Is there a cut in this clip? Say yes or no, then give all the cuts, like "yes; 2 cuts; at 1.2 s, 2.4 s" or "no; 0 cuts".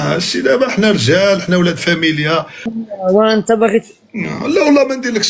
yes; 1 cut; at 2.6 s